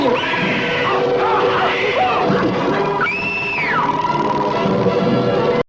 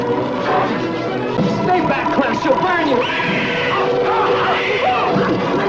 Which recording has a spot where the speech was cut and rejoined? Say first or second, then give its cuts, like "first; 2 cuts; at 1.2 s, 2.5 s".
second; 1 cut; at 1.4 s